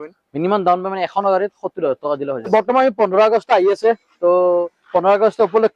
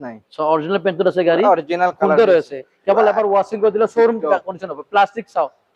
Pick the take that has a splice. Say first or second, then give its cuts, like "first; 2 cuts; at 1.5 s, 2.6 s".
first; 1 cut; at 2.5 s